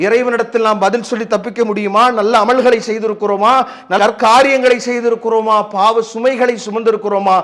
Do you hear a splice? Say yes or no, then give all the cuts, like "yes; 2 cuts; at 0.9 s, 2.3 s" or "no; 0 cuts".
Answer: no; 0 cuts